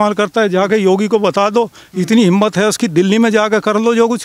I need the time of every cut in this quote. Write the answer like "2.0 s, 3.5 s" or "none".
none